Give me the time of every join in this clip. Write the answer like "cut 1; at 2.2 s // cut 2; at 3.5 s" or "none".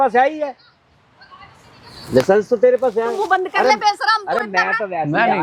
none

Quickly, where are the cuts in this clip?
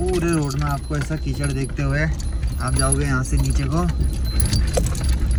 none

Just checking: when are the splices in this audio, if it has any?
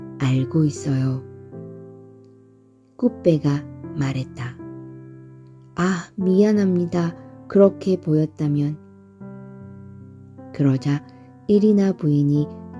none

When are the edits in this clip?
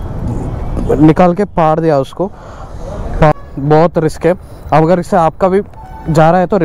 cut 1; at 3.3 s

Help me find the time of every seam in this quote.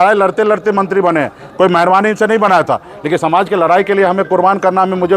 none

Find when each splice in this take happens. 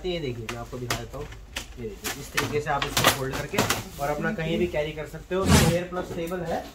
cut 1; at 5.7 s

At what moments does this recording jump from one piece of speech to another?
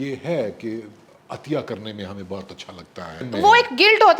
cut 1; at 3.3 s

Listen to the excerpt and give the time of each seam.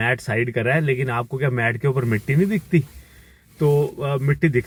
none

